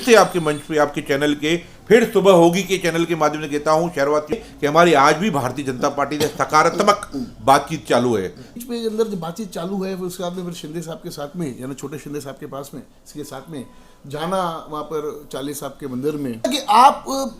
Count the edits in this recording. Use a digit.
3